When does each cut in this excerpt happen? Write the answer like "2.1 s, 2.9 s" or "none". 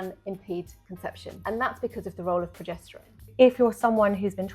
1.3 s, 3.3 s